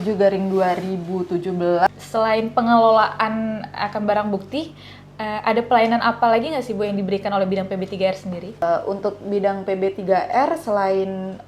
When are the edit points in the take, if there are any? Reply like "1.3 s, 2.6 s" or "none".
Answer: 1.9 s, 8.5 s